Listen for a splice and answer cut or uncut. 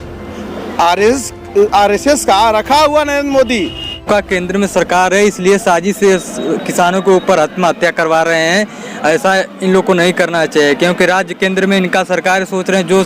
cut